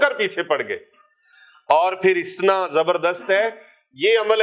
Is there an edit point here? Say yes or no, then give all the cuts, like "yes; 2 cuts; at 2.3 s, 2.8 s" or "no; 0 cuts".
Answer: no; 0 cuts